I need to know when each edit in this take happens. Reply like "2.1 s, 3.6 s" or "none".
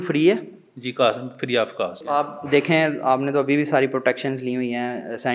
2.0 s